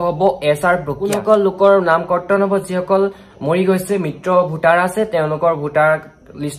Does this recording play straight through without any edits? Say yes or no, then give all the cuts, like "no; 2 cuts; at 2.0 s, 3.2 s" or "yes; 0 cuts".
no; 1 cut; at 1.0 s